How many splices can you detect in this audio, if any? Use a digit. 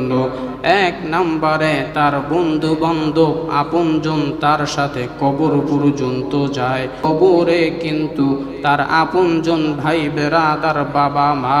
1